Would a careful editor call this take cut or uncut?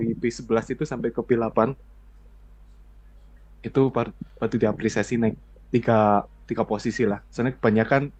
uncut